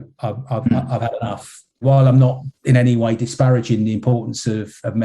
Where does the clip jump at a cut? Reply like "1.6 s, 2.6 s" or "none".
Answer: 1.8 s